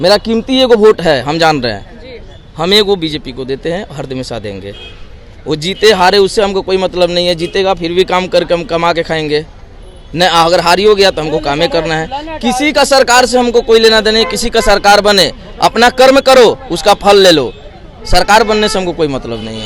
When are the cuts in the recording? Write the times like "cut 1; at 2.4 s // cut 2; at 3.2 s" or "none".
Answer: none